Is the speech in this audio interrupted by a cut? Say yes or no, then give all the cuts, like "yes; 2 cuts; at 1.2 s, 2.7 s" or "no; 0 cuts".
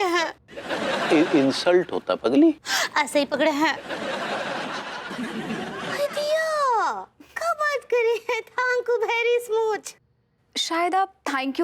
yes; 1 cut; at 5.0 s